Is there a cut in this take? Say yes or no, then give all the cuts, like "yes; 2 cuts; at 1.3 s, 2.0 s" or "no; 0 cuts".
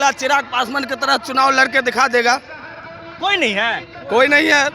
no; 0 cuts